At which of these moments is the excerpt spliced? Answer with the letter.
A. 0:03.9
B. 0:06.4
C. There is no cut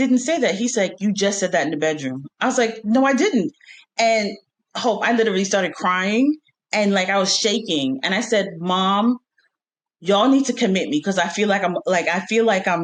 C